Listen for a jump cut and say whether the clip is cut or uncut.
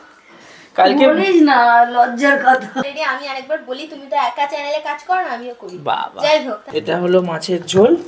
cut